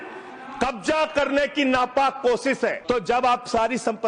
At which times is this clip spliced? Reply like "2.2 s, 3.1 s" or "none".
2.8 s